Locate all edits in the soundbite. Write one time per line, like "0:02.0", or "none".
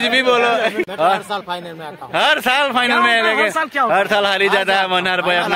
0:00.9